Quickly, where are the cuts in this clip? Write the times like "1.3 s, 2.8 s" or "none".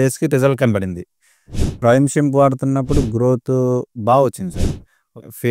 1.8 s